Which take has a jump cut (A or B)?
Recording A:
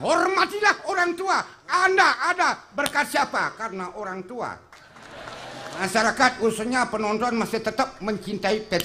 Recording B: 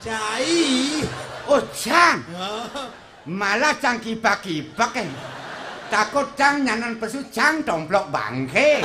A